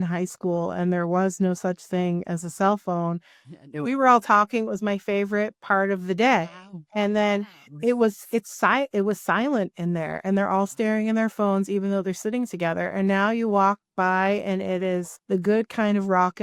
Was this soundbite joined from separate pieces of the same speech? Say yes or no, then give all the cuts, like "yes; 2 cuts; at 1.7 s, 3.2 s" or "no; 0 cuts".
no; 0 cuts